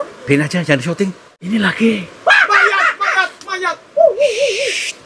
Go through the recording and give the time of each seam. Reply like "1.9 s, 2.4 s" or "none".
1.3 s